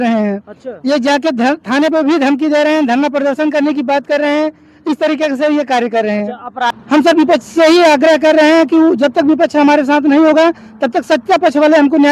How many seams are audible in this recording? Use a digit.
1